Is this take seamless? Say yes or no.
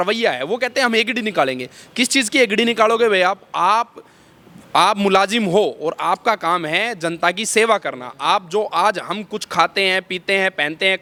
yes